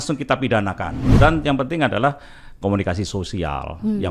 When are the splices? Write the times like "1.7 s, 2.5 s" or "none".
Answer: 0.9 s